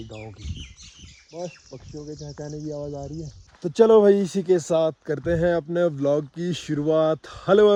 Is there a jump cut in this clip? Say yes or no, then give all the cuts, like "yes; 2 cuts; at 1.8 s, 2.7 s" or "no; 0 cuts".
no; 0 cuts